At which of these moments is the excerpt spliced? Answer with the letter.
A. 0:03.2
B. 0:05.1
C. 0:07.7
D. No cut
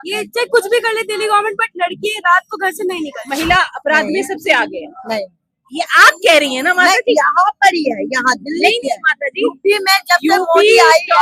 A